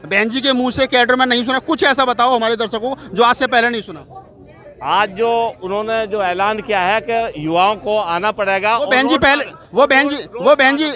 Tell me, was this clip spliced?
no; 0 cuts

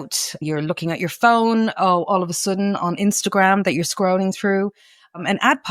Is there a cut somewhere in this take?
no; 0 cuts

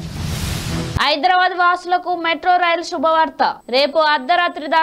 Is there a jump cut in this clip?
yes; 1 cut; at 1.0 s

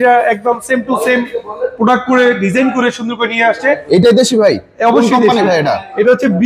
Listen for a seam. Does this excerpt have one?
no; 0 cuts

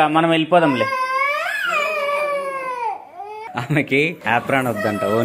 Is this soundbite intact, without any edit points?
no; 2 cuts; at 3.4 s, 4.2 s

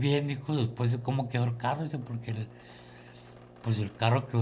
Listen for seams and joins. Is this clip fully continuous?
yes; 0 cuts

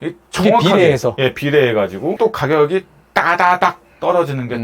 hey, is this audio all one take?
no; 1 cut; at 2.2 s

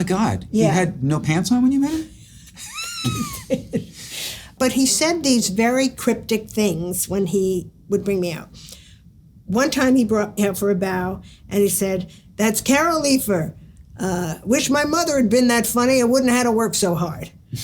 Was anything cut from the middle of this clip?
yes; 1 cut; at 4.5 s

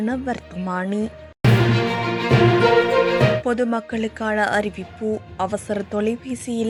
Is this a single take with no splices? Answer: yes; 0 cuts

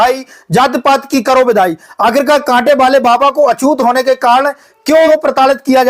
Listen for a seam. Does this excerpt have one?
yes; 1 cut; at 5.0 s

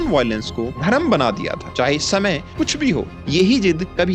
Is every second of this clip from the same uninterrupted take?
yes; 0 cuts

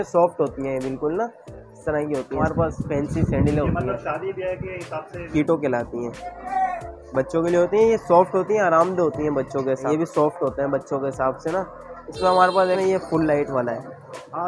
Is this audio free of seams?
no; 4 cuts; at 2.4 s, 5.3 s, 9.8 s, 12.8 s

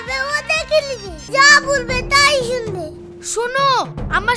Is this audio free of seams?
no; 1 cut; at 1.1 s

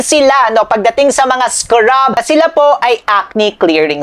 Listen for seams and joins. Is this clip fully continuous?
no; 1 cut; at 2.2 s

